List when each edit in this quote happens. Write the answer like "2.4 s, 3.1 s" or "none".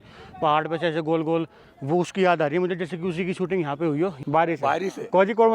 4.2 s